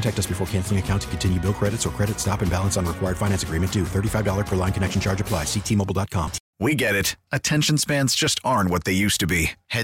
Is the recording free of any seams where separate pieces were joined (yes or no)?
no